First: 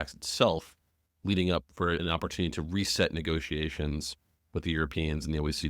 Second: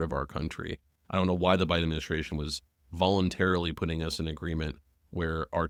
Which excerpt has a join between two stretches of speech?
first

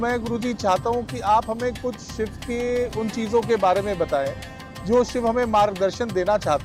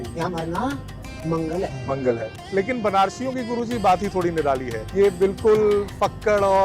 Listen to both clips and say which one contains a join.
second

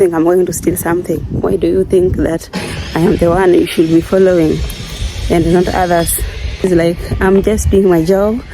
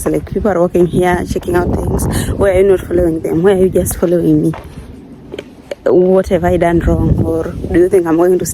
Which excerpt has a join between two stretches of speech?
first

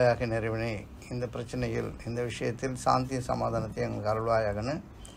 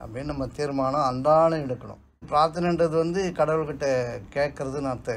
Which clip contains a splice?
second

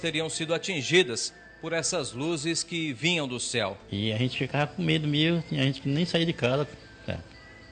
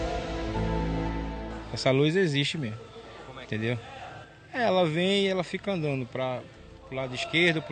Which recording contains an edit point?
first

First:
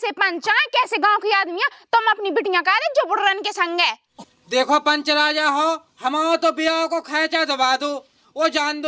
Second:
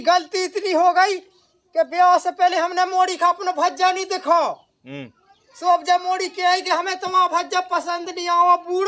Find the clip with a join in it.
first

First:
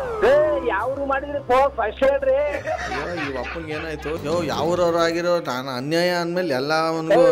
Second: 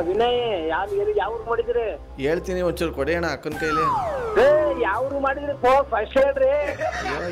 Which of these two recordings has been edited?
first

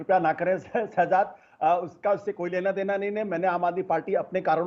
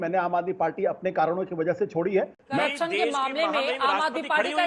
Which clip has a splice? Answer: second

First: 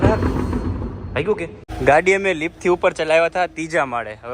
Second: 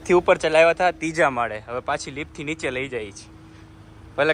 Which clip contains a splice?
first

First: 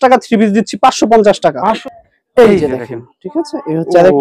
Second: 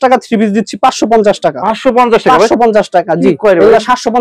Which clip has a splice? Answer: first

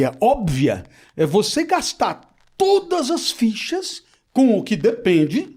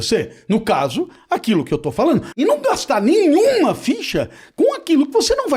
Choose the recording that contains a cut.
second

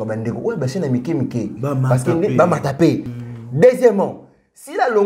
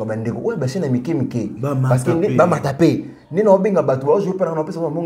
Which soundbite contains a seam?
first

